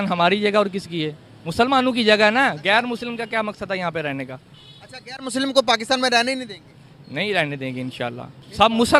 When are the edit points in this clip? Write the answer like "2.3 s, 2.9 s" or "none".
2.3 s